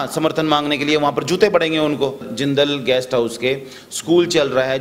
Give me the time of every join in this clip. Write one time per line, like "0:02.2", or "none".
0:02.3